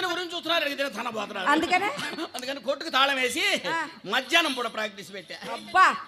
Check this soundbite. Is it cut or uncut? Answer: uncut